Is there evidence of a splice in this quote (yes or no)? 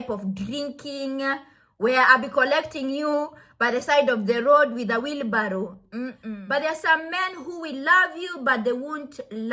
yes